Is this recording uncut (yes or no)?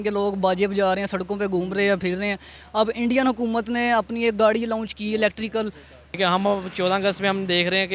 no